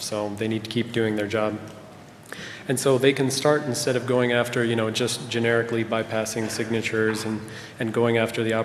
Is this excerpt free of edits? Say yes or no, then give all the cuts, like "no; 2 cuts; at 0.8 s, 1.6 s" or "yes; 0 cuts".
yes; 0 cuts